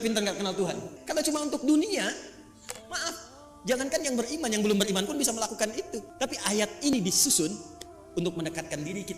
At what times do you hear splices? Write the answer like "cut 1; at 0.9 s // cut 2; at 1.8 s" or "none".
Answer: cut 1; at 1.0 s // cut 2; at 6.0 s

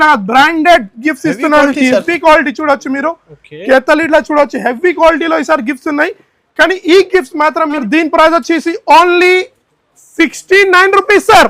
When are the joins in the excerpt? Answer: cut 1; at 7.8 s

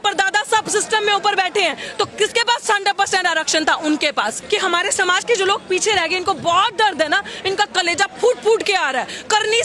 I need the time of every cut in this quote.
cut 1; at 4.4 s

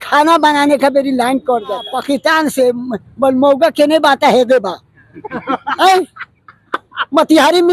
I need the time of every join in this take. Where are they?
cut 1; at 1.9 s

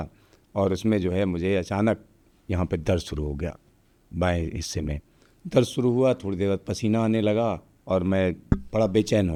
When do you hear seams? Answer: none

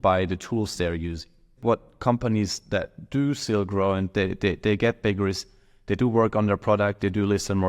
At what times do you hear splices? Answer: cut 1; at 1.6 s

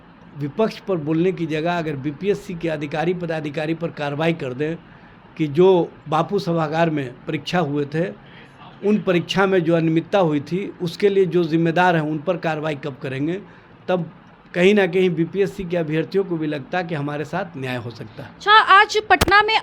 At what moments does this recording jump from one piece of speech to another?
none

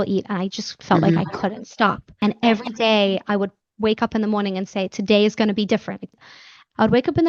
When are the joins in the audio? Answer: cut 1; at 2.2 s // cut 2; at 6.3 s

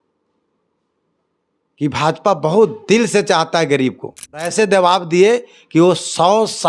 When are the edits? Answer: cut 1; at 4.5 s

